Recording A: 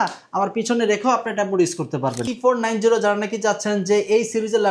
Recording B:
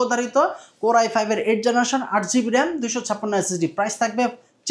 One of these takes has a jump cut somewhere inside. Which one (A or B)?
A